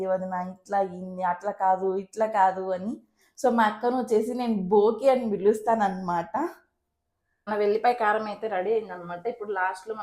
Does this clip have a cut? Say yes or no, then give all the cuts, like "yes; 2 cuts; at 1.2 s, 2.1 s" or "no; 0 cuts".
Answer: yes; 1 cut; at 7.3 s